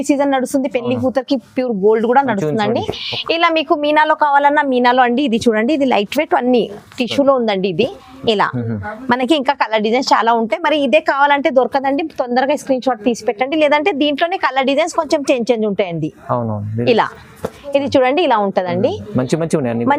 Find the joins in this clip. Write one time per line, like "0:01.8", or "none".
none